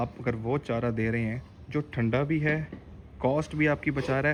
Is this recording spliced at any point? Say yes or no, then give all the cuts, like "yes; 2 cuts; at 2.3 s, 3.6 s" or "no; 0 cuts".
no; 0 cuts